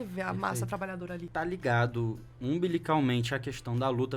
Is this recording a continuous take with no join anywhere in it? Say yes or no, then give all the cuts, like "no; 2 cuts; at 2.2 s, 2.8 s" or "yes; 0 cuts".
no; 1 cut; at 1.3 s